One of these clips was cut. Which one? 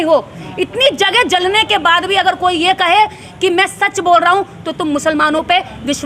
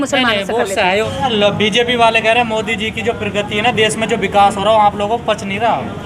second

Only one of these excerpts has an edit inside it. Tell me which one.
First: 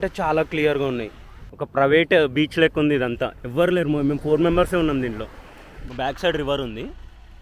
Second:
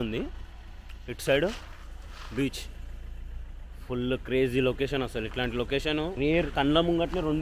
first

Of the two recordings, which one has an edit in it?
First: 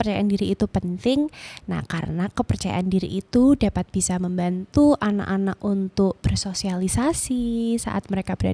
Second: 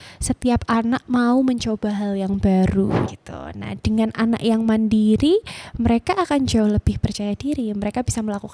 second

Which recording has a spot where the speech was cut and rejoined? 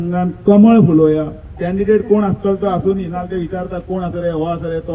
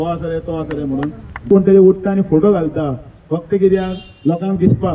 second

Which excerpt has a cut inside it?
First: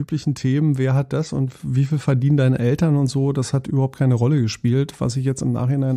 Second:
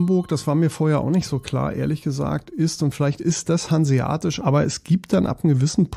second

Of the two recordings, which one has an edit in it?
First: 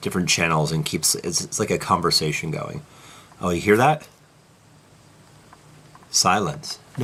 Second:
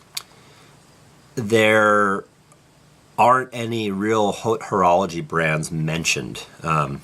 second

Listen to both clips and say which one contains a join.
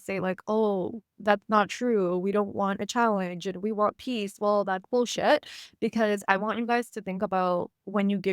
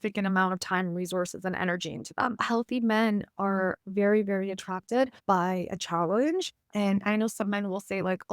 second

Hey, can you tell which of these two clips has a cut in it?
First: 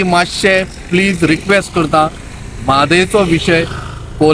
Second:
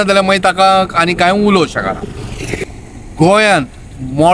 second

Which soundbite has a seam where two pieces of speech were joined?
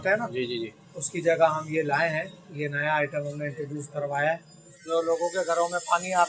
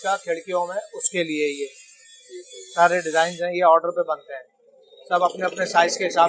first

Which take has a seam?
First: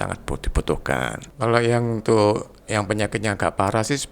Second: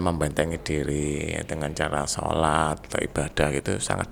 first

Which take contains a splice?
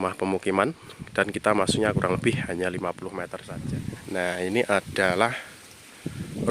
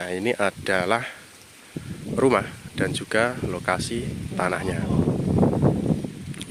first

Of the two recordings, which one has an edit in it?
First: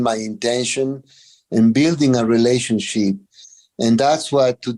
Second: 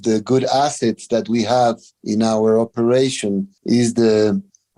second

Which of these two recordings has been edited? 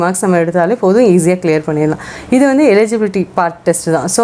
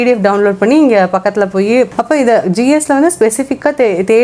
second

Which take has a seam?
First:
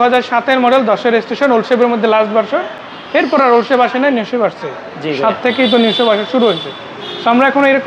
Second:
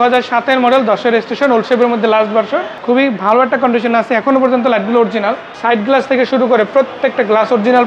second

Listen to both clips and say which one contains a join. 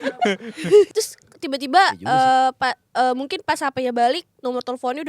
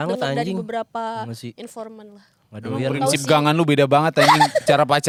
first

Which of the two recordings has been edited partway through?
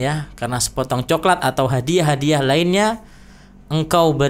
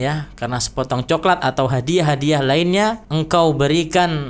second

